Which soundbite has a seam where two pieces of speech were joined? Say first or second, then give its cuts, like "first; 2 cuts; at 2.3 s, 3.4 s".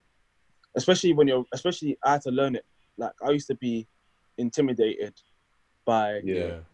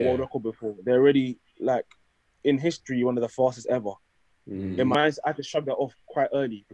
second; 1 cut; at 4.9 s